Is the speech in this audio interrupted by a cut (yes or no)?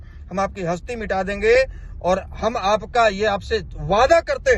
no